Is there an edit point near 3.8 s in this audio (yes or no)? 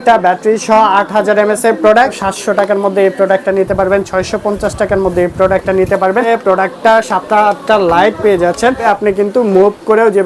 no